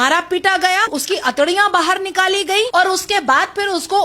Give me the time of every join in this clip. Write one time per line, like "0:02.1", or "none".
0:01.0
0:02.7